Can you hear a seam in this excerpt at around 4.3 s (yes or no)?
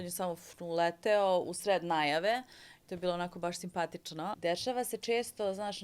yes